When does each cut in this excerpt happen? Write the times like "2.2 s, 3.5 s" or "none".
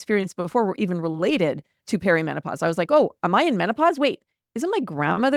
none